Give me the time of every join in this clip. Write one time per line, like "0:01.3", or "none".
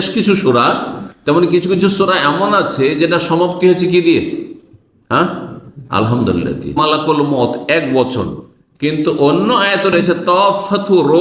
0:06.8